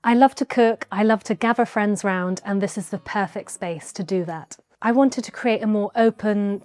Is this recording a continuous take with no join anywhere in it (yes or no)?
no